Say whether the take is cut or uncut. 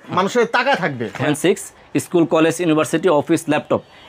cut